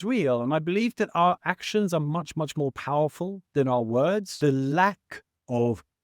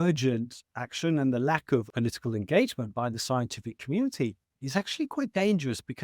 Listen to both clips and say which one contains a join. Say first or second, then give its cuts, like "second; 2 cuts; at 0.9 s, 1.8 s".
first; 1 cut; at 4.3 s